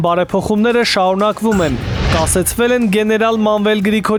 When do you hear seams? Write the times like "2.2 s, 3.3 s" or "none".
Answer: none